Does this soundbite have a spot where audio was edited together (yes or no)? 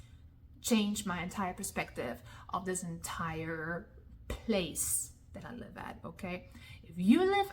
no